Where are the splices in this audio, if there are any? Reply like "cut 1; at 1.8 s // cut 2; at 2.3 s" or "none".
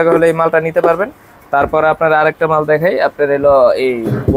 none